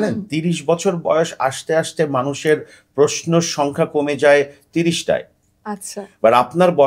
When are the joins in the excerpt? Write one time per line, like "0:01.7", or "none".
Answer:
none